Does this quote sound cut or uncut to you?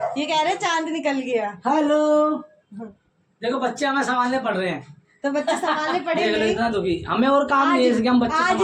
uncut